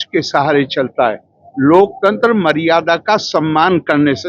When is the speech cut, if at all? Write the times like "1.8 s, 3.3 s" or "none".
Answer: none